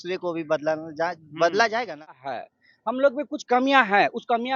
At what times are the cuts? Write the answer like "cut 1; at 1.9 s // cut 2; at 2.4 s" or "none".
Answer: cut 1; at 2.3 s